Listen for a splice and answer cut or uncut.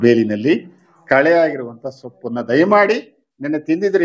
uncut